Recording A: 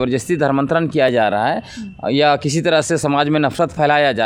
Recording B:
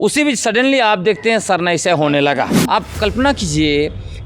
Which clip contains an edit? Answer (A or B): B